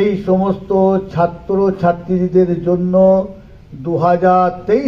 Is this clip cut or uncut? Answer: uncut